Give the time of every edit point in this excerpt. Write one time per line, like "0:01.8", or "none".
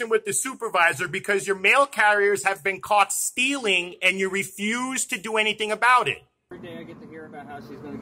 0:06.5